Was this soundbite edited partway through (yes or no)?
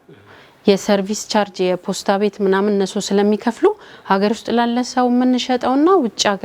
no